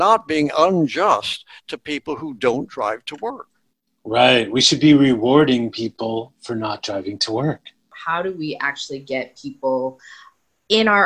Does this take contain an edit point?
yes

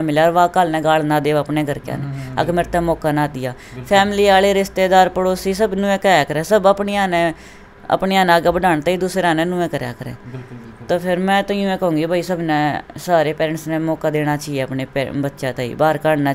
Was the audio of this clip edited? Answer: no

